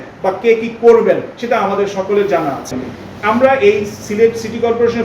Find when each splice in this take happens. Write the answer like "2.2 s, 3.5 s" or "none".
2.9 s